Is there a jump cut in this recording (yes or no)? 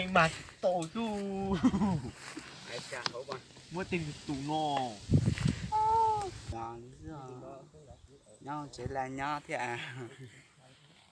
yes